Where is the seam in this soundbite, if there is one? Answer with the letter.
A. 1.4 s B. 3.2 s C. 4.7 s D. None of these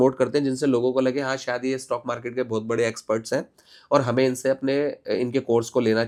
D